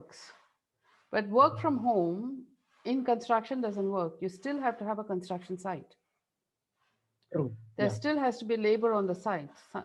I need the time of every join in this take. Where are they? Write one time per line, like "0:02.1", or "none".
none